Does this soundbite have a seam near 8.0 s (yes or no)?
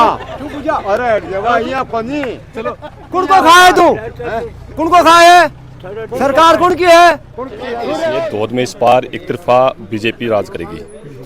yes